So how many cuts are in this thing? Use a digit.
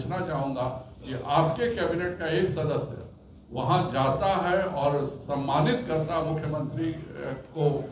0